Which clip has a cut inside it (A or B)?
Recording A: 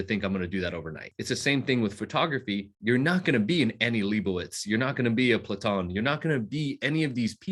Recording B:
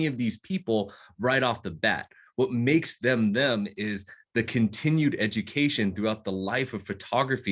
A